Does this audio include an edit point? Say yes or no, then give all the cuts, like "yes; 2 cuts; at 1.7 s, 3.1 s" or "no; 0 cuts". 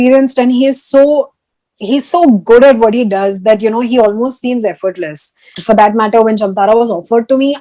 yes; 1 cut; at 5.6 s